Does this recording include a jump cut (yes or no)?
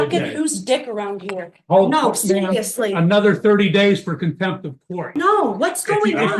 yes